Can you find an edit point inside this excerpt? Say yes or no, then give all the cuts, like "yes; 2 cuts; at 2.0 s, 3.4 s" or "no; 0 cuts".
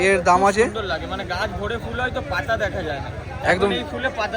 no; 0 cuts